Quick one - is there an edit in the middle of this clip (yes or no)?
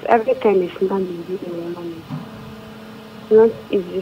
no